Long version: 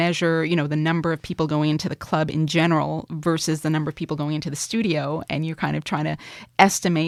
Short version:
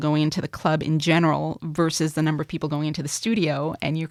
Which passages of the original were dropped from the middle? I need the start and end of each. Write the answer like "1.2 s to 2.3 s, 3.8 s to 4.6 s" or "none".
none